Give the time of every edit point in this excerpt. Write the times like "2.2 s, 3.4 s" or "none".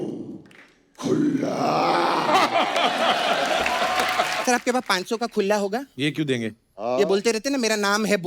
4.4 s